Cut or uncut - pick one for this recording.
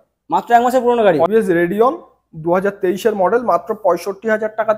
cut